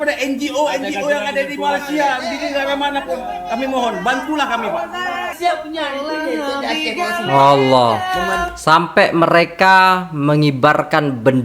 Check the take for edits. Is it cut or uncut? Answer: cut